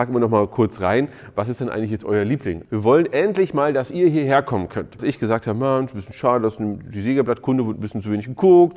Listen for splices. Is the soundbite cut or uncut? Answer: cut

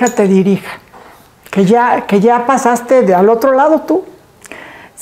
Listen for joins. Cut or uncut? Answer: uncut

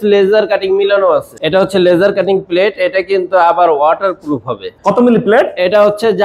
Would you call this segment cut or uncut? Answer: cut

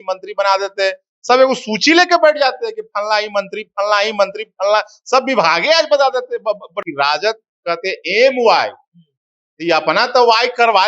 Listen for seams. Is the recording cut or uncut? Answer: cut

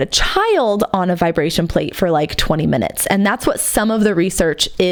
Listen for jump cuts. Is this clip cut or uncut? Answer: uncut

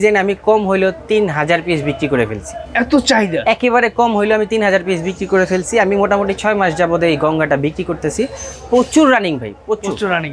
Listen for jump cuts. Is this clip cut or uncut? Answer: uncut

